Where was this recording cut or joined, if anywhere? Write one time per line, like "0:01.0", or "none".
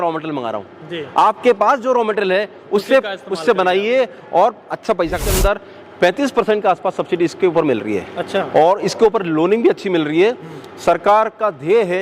0:05.3